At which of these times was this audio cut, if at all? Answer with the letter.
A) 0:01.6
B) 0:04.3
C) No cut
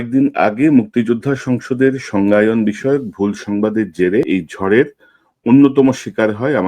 B